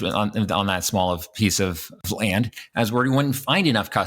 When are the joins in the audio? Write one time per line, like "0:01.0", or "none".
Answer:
0:02.0